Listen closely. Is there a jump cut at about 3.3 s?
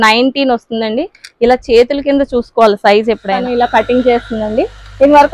yes; 1 cut; at 3.3 s

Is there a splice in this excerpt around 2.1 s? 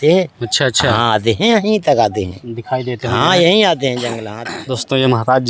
no; 1 cut; at 4.3 s

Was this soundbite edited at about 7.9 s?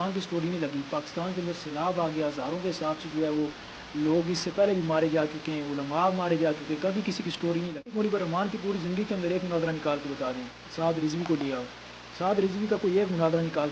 yes; 1 cut; at 7.9 s

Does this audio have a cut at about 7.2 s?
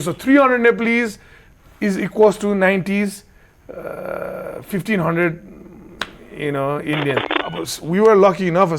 yes; 1 cut; at 7.2 s

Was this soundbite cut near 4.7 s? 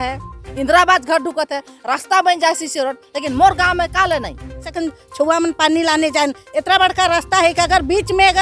yes; 1 cut; at 4.7 s

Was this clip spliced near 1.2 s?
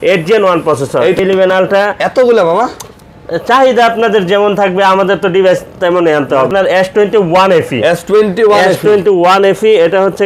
yes; 2 cuts; at 1.2 s, 6.5 s

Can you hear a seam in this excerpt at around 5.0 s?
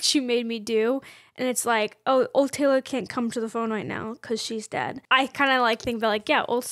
yes; 1 cut; at 5.0 s

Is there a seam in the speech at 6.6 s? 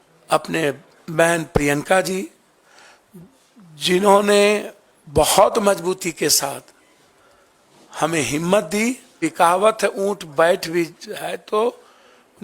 no; 1 cut; at 9.2 s

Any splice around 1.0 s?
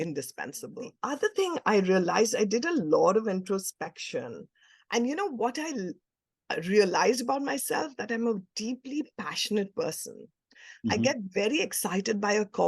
yes; 1 cut; at 1.0 s

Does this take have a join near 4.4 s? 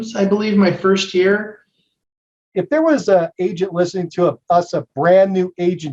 no; 1 cut; at 2.4 s

